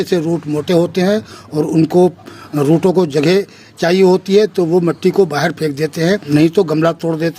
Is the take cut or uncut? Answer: cut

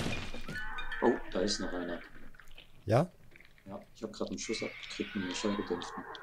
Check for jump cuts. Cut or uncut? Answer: uncut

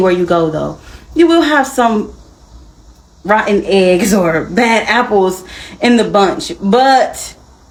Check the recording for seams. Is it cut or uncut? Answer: uncut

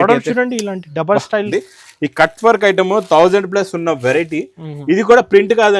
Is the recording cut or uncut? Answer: cut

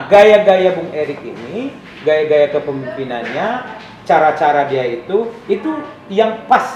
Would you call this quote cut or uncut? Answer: uncut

